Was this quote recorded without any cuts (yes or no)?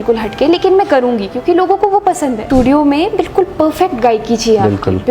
no